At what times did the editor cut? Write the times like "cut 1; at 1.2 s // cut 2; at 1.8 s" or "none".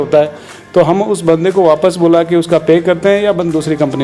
none